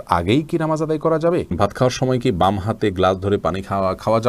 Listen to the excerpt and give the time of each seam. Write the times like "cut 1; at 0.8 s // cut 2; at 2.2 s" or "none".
cut 1; at 1.5 s